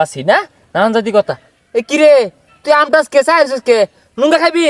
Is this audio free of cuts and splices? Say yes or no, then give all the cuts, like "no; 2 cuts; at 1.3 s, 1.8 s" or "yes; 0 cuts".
yes; 0 cuts